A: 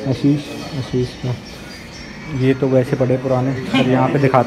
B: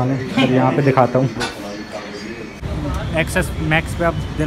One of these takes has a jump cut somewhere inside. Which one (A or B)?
B